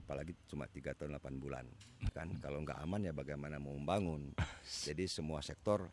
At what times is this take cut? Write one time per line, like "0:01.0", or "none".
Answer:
0:02.1